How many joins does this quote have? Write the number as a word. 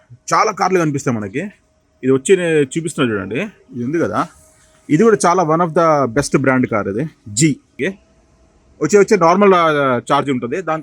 one